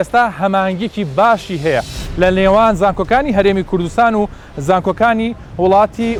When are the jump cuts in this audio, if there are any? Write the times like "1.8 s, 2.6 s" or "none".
none